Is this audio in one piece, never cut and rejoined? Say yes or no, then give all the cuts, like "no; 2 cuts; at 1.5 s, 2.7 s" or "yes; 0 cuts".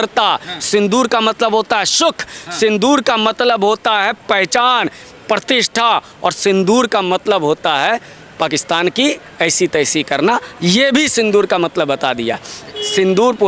yes; 0 cuts